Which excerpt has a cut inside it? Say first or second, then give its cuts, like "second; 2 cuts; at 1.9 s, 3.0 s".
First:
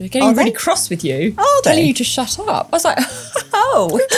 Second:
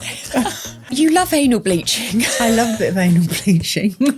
second; 1 cut; at 1.0 s